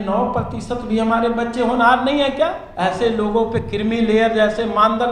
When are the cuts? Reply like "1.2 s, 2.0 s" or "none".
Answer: 2.6 s